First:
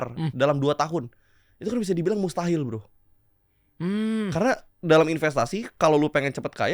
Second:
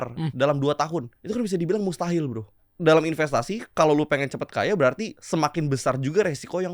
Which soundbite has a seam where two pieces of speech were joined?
second; 3 cuts; at 1.2 s, 2.7 s, 5.1 s

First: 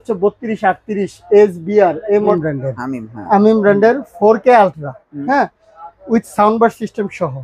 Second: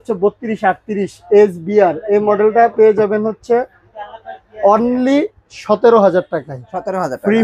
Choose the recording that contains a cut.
first; 1 cut; at 2.3 s

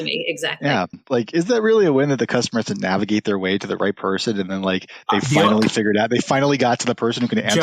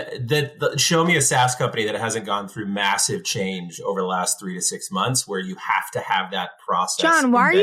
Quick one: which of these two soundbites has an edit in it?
first; 1 cut; at 1.0 s

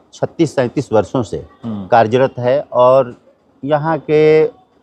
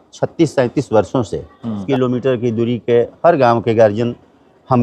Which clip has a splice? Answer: second; 1 cut; at 1.8 s

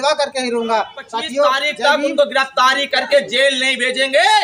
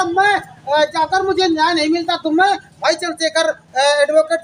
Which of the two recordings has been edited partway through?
first; 1 cut; at 1.7 s

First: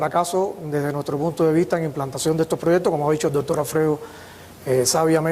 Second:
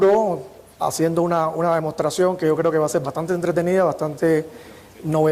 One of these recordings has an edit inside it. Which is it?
first; 1 cut; at 2.4 s

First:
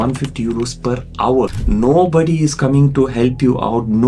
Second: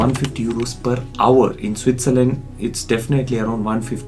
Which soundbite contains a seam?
first; 1 cut; at 1.6 s

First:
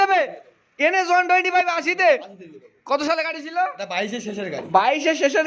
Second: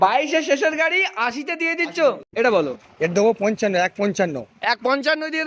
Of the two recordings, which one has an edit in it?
second; 1 cut; at 2.2 s

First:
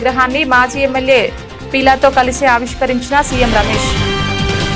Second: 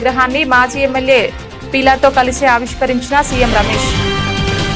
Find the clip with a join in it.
first; 1 cut; at 3.8 s

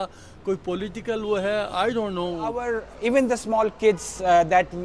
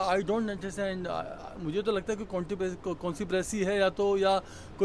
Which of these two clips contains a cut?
first; 1 cut; at 2.7 s

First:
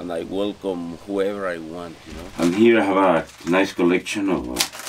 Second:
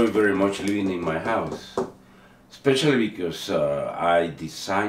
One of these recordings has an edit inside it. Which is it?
first; 1 cut; at 2.2 s

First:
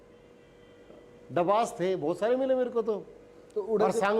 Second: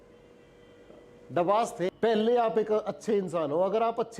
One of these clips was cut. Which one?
second; 1 cut; at 1.9 s

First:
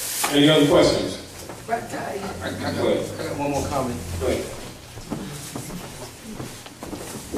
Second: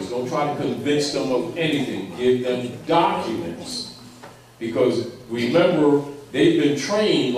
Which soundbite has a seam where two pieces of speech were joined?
second; 1 cut; at 3.4 s

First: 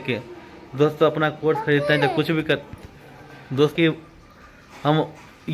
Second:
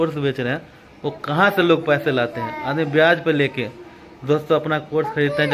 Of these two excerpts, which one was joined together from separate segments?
first; 1 cut; at 3.7 s

